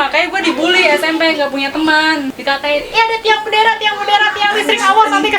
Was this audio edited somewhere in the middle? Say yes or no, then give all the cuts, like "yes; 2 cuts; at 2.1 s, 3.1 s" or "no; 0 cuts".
yes; 1 cut; at 2.3 s